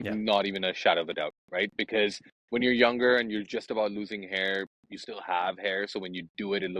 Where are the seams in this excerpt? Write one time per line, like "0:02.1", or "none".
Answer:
0:02.3